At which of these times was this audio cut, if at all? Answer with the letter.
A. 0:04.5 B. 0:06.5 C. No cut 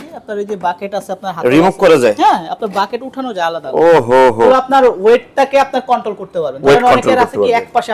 A